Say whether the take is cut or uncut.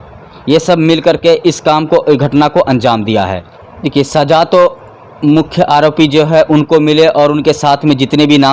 cut